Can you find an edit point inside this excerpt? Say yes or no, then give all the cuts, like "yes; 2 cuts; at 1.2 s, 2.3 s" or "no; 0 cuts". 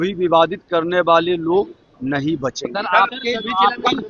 no; 0 cuts